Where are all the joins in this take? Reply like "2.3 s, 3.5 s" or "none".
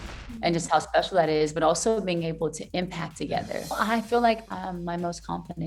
3.8 s